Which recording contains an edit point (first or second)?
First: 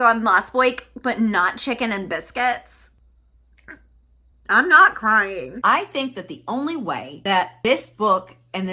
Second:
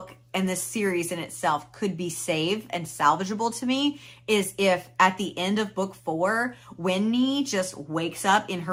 first